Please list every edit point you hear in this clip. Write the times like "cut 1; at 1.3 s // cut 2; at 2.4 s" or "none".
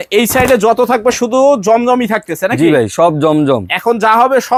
none